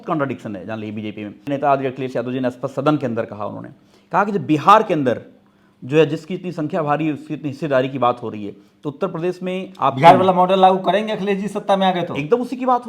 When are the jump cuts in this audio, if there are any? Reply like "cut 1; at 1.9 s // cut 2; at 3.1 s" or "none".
cut 1; at 1.5 s